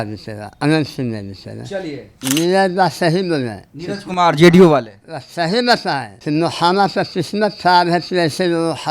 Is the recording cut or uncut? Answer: cut